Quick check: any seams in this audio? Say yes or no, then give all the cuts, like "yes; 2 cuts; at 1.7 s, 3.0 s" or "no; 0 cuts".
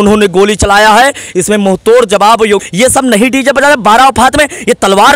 yes; 1 cut; at 2.7 s